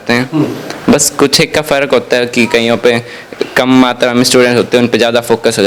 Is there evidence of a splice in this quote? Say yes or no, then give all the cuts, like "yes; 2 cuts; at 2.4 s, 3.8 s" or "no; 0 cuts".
no; 0 cuts